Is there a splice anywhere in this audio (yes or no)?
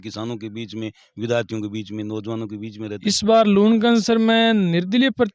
yes